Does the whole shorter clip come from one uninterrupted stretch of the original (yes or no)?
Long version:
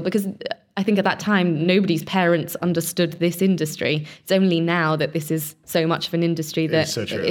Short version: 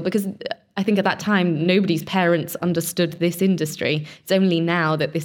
yes